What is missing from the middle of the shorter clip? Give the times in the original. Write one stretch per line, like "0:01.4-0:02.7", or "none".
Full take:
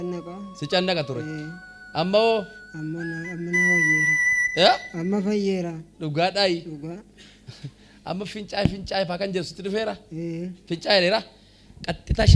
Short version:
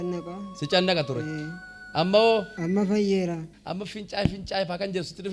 0:02.5-0:04.9
0:05.9-0:07.9